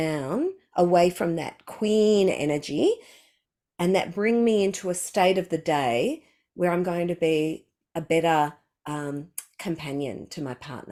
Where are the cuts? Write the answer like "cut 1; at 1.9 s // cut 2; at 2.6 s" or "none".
none